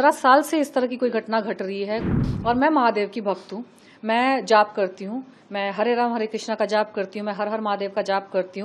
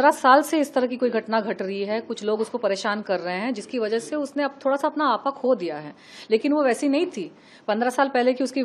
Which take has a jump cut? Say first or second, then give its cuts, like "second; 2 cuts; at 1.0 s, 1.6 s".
first; 1 cut; at 2.1 s